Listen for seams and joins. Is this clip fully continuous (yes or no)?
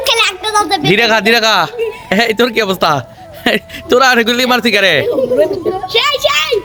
yes